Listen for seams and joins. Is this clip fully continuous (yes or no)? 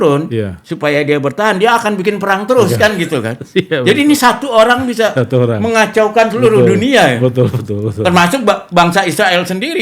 yes